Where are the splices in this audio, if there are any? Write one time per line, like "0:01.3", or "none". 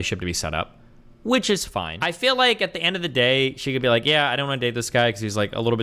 0:01.9